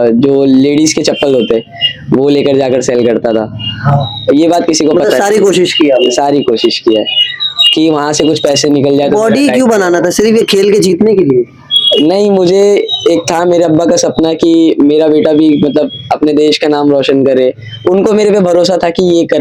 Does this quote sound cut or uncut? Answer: uncut